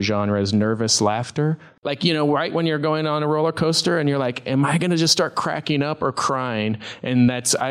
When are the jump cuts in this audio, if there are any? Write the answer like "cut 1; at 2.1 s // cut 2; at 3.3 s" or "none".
cut 1; at 1.7 s